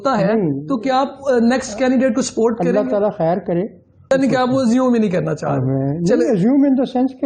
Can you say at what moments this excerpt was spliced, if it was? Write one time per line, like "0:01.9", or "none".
0:04.1